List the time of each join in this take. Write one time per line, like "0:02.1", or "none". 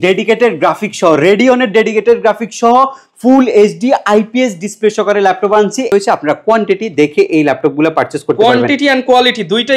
0:05.9